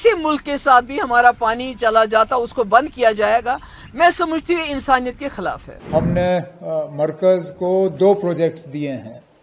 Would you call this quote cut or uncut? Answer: cut